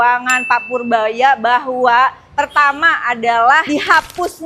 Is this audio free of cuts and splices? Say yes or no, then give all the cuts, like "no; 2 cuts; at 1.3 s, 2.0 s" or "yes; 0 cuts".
yes; 0 cuts